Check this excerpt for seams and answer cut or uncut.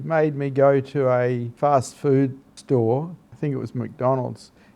cut